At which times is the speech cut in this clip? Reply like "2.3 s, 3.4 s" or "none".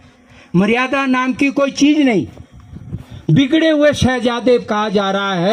none